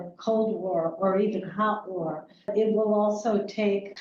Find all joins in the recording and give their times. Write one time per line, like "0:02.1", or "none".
0:02.5